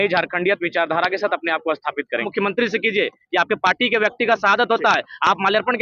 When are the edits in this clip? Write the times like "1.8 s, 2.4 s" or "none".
2.3 s